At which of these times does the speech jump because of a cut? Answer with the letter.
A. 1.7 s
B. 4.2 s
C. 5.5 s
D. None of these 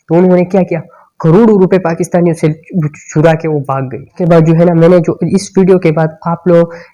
B